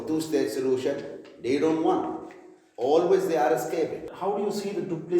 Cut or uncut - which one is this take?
cut